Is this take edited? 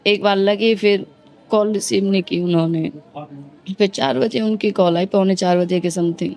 no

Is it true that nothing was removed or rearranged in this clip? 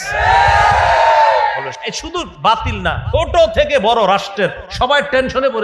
no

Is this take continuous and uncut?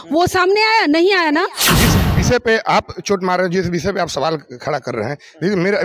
no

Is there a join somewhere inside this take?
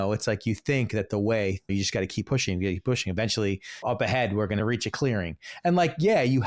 yes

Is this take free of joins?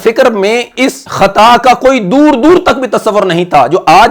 no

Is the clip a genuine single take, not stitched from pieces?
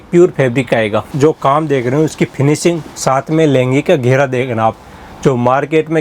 no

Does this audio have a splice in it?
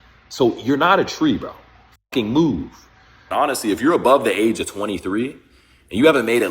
yes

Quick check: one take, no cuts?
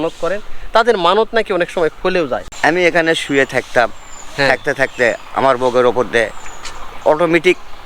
no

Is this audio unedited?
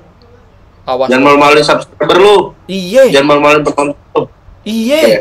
yes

